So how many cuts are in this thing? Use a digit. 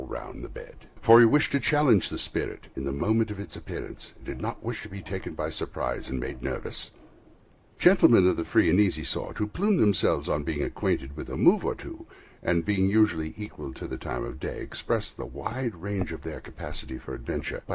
0